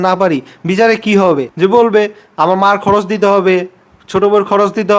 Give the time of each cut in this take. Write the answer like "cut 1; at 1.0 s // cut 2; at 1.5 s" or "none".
none